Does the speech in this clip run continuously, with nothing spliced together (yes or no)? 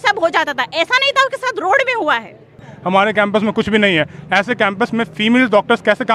no